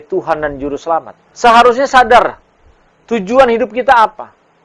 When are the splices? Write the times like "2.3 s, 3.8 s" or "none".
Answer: 1.2 s